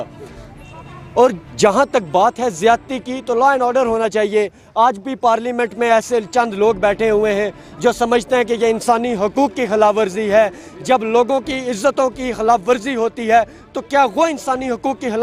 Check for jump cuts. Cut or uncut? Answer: uncut